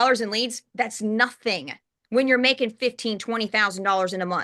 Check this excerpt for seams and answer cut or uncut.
uncut